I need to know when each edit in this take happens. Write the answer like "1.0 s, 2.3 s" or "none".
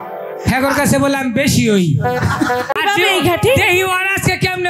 2.7 s